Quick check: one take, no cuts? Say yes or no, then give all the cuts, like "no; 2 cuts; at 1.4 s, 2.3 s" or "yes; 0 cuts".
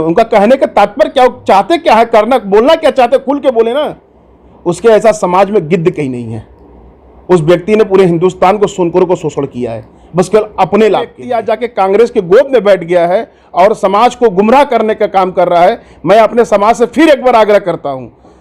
no; 1 cut; at 11.3 s